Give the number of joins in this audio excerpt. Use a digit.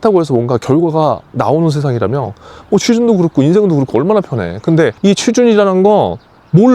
1